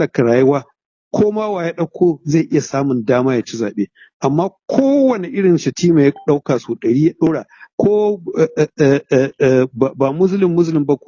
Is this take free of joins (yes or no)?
yes